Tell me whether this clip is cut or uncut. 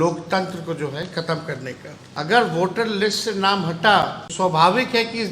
cut